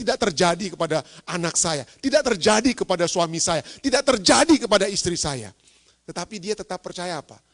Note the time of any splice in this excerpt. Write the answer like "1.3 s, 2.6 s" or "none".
none